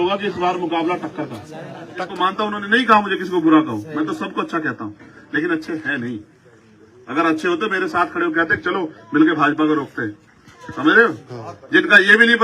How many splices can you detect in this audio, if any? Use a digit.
1